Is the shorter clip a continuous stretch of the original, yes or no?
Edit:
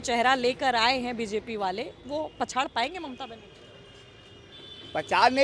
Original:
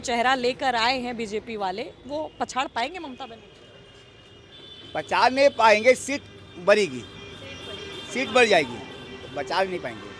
yes